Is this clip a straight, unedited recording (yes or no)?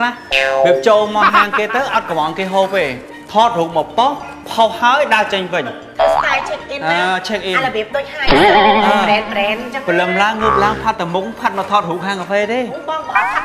yes